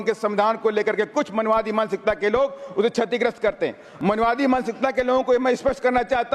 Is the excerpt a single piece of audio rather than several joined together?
no; 1 cut; at 3.8 s

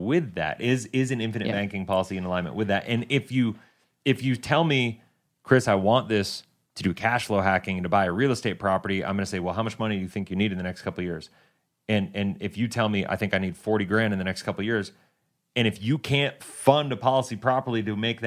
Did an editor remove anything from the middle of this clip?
no; 0 cuts

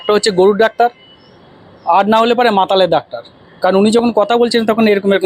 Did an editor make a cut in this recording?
no; 0 cuts

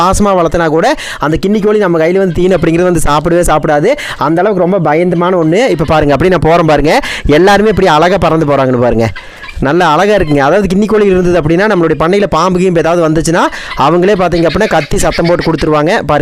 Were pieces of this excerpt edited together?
no; 0 cuts

